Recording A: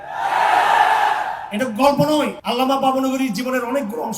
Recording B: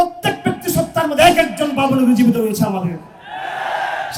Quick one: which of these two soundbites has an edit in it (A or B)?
A